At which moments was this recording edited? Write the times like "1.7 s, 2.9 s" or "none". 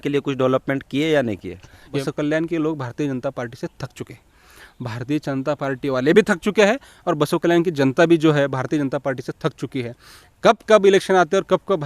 1.9 s